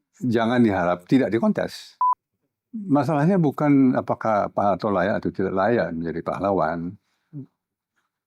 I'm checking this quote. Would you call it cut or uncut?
cut